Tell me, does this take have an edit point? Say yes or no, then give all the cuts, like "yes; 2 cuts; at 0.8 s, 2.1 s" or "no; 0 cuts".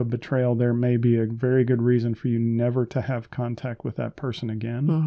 no; 0 cuts